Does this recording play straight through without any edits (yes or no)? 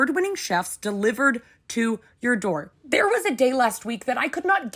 no